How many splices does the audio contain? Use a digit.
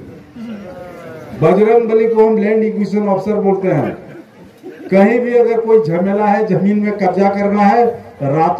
1